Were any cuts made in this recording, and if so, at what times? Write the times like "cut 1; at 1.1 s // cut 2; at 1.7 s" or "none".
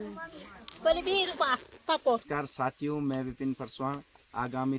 cut 1; at 2.2 s